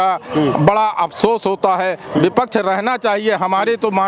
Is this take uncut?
yes; 0 cuts

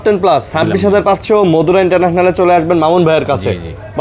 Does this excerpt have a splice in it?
no; 0 cuts

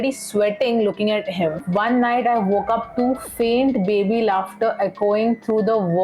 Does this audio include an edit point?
yes; 1 cut; at 1.7 s

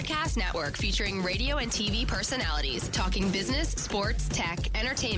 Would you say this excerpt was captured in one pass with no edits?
yes; 0 cuts

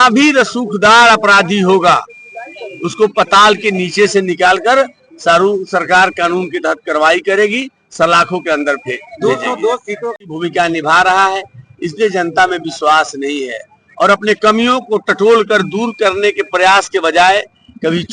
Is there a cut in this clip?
yes; 1 cut; at 10.3 s

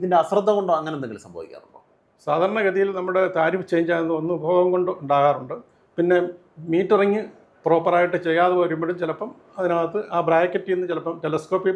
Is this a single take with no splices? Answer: yes; 0 cuts

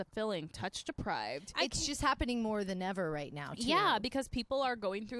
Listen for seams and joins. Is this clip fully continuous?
yes; 0 cuts

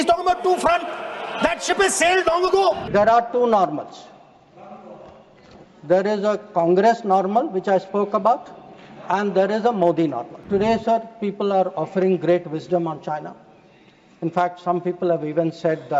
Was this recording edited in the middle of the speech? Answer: yes; 2 cuts; at 2.8 s, 10.3 s

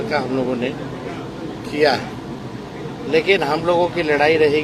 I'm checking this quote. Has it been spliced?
no; 0 cuts

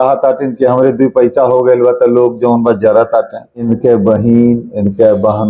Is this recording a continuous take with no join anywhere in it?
no; 1 cut; at 3.7 s

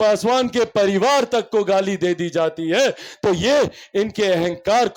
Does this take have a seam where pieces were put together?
no; 0 cuts

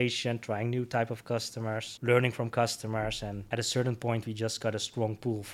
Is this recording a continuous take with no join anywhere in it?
no; 2 cuts; at 1.9 s, 3.4 s

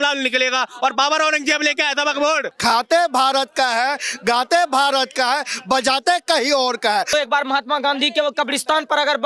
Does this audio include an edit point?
yes; 2 cuts; at 2.5 s, 7.1 s

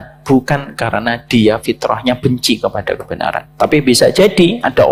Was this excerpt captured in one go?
yes; 0 cuts

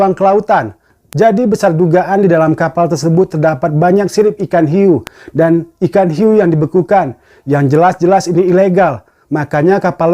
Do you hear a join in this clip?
yes; 1 cut; at 1.0 s

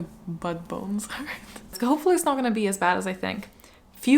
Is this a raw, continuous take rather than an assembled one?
no; 1 cut; at 1.6 s

